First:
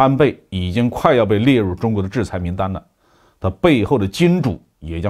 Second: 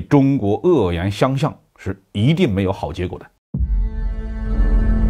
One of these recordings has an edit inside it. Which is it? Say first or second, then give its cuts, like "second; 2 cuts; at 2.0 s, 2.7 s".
second; 1 cut; at 3.3 s